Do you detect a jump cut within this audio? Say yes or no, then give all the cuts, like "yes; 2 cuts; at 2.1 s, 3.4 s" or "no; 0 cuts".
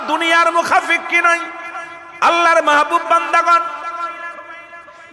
yes; 1 cut; at 4.0 s